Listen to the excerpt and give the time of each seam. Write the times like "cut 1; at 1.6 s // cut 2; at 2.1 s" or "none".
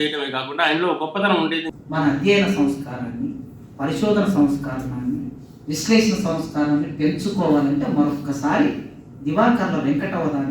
cut 1; at 1.8 s